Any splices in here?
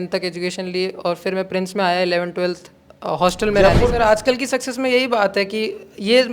yes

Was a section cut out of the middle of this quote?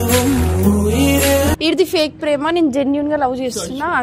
yes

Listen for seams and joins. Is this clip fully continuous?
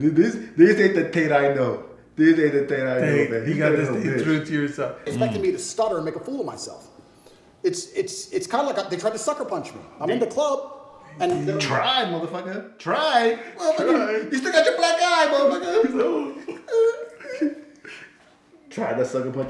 no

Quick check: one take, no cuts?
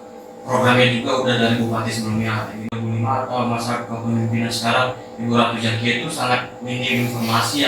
no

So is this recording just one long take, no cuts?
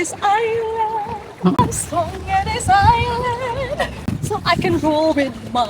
no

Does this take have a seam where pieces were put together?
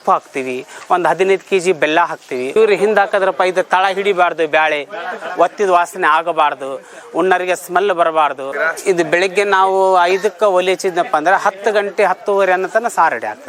yes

